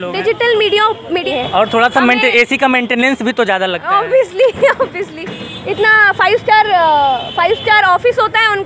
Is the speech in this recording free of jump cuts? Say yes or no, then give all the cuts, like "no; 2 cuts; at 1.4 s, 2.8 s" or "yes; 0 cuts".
no; 1 cut; at 1.3 s